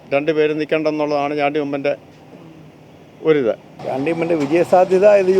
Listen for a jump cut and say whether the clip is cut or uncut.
cut